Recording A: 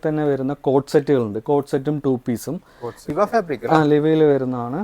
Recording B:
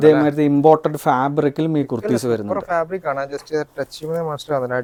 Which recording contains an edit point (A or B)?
A